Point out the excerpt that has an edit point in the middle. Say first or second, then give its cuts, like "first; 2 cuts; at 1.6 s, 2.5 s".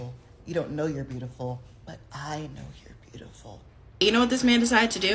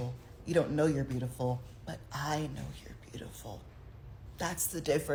first; 1 cut; at 4.0 s